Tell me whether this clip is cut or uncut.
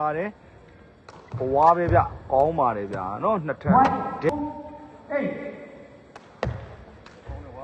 uncut